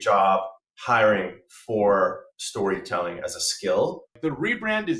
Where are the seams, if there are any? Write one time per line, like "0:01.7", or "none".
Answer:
0:04.1